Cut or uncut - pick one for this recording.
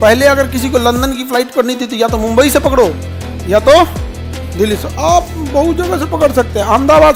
uncut